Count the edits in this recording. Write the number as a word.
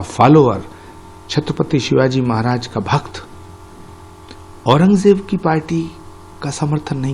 zero